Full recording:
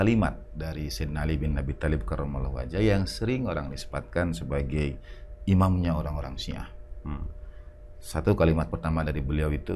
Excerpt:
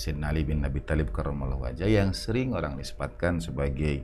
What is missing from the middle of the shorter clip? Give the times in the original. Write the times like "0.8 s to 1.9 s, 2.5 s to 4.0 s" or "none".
none